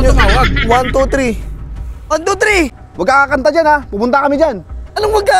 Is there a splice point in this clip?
yes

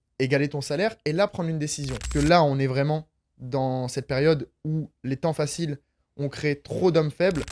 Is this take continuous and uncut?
no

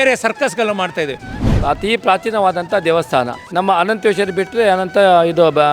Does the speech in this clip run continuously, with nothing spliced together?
no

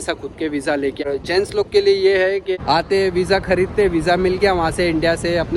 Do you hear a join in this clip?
yes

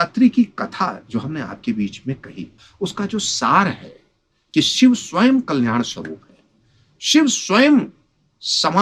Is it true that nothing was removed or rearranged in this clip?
no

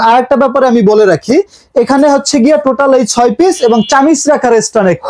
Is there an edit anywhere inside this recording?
no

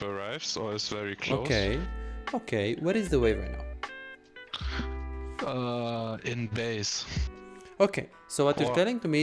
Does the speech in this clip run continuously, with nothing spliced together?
yes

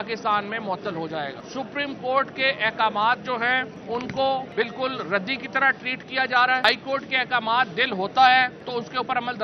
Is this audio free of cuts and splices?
no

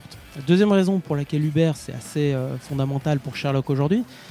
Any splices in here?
no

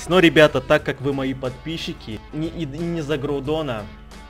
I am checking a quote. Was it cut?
yes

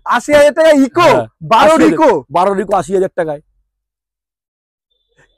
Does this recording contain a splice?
no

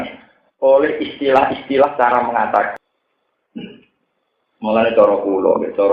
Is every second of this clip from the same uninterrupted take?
no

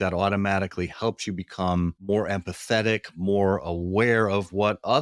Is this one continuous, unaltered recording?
yes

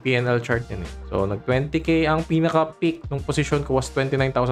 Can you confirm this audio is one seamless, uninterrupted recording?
yes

